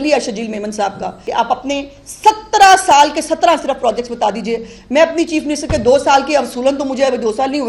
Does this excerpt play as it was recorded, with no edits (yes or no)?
no